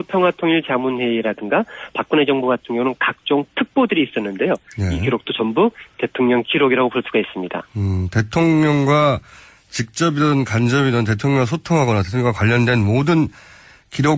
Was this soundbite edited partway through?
yes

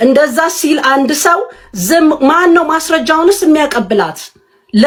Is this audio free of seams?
yes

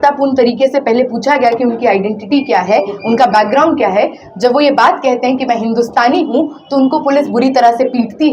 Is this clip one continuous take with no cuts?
yes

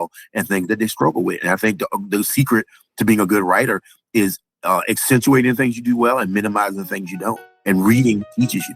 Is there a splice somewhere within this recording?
yes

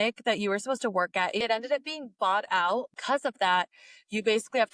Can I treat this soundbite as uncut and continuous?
no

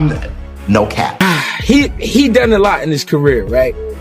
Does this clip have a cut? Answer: yes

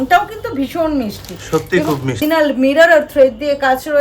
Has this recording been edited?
yes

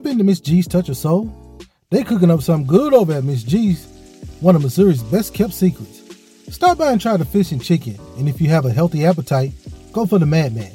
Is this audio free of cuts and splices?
yes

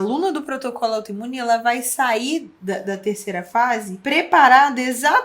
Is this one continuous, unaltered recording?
no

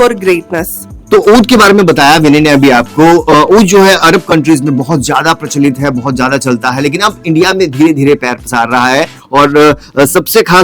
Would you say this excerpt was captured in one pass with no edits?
yes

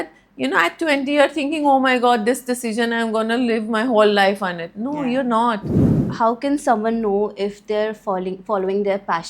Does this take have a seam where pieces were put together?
yes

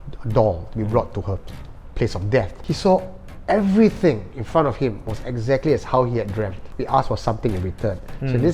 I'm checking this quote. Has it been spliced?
yes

